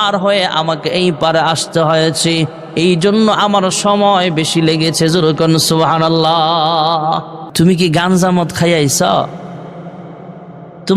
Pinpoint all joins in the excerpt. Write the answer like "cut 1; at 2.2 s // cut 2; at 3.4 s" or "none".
cut 1; at 7.4 s